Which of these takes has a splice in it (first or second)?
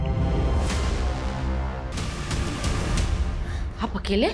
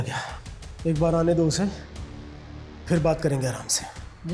first